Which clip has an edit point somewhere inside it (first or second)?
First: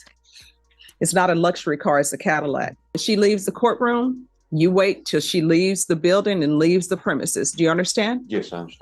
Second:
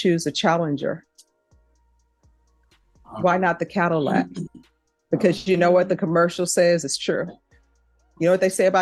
first